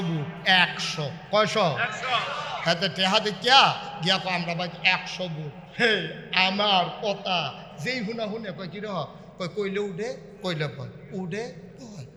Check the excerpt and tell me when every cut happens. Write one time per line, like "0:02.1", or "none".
none